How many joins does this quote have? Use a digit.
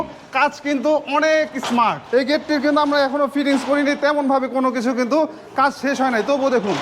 1